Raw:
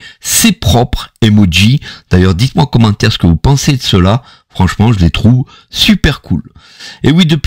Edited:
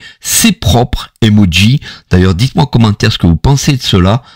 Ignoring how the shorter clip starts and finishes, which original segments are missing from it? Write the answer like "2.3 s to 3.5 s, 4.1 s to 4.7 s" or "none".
none